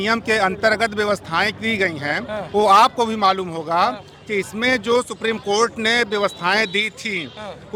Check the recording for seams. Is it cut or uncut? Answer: uncut